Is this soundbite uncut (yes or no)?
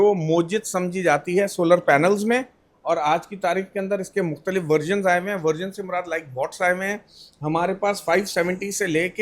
yes